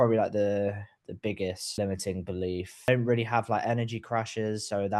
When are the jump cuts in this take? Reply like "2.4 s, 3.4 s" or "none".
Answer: 1.8 s, 2.9 s